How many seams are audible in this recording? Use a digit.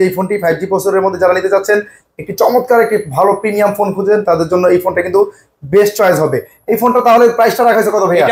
0